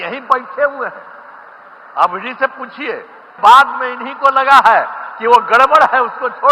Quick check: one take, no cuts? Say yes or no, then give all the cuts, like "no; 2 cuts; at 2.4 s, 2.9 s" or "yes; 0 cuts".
no; 1 cut; at 3.3 s